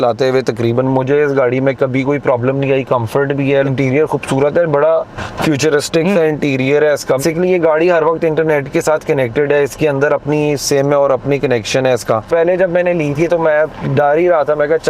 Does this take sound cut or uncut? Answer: cut